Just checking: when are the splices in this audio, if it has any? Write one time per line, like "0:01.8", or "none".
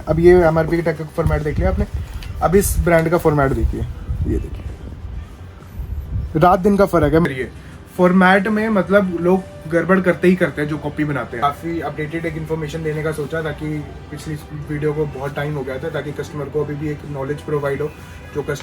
0:07.2
0:11.3